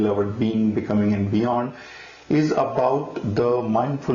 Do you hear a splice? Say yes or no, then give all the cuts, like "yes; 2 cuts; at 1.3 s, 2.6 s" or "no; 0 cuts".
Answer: no; 0 cuts